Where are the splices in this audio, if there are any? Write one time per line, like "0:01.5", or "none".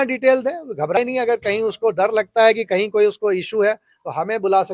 0:01.0